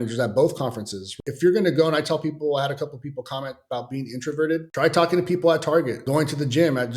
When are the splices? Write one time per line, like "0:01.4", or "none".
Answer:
0:01.1
0:04.7
0:06.0